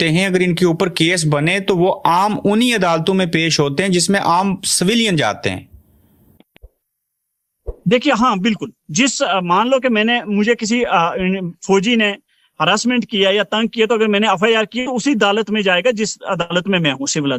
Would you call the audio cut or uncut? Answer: uncut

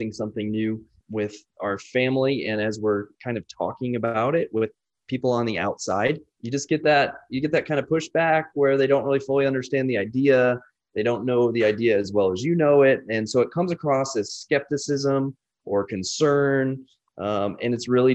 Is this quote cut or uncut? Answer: cut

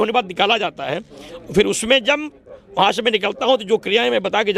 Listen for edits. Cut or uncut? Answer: uncut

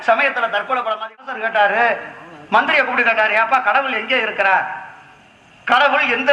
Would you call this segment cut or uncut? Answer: cut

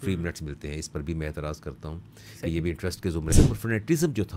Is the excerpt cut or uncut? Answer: cut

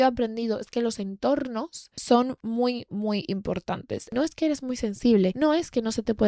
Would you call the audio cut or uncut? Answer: cut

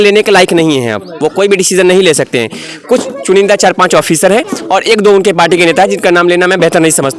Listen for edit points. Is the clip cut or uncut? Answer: uncut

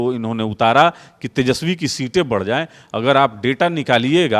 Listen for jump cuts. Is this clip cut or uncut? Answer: uncut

